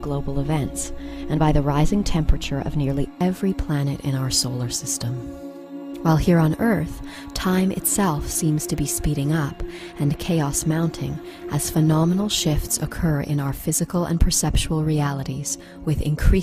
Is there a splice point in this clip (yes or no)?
yes